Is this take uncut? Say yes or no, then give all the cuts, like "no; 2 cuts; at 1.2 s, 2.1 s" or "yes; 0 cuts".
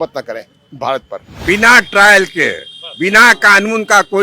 no; 1 cut; at 1.4 s